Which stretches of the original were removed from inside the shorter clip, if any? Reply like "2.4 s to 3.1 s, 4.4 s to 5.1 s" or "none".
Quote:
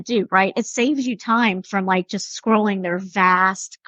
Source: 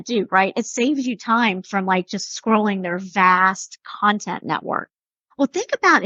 none